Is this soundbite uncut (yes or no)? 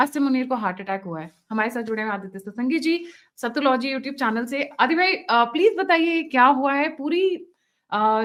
yes